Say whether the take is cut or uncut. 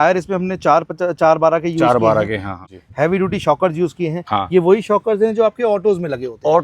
cut